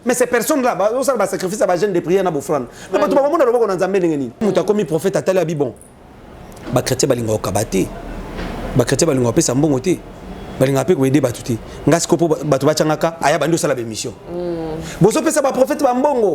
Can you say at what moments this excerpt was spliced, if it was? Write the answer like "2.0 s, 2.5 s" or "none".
4.4 s

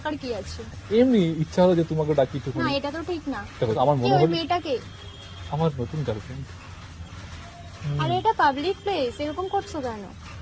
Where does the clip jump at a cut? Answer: 3.8 s

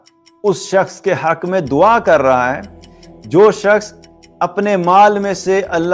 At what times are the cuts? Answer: none

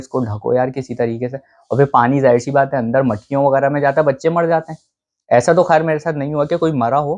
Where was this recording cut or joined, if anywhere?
none

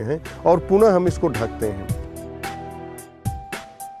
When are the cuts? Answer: 1.8 s

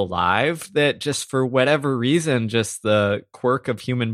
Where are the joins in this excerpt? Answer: none

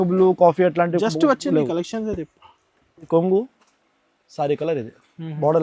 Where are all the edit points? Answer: 3.1 s

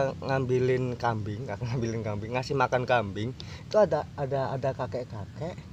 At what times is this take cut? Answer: 1.5 s, 3.3 s

